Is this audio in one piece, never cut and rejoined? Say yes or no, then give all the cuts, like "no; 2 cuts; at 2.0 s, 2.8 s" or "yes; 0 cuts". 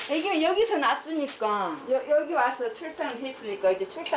no; 1 cut; at 1.8 s